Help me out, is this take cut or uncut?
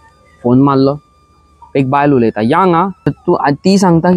cut